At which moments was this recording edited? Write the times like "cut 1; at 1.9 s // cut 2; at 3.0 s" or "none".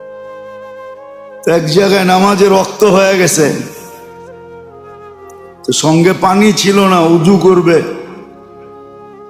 cut 1; at 0.9 s